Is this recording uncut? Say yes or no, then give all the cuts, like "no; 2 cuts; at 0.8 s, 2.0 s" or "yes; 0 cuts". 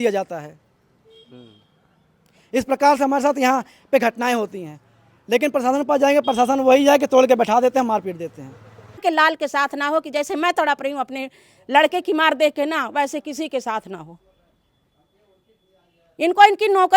no; 1 cut; at 9.0 s